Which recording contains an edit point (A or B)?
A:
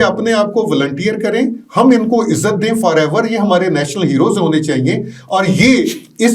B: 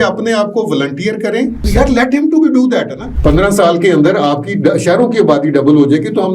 B